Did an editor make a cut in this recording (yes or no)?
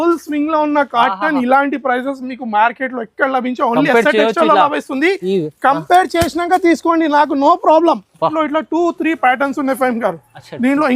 yes